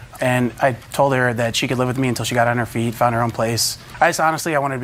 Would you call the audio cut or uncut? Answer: uncut